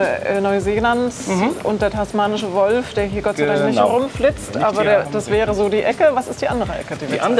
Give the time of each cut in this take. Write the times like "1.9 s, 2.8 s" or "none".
none